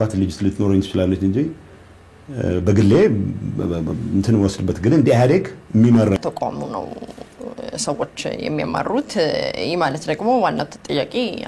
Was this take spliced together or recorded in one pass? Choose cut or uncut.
cut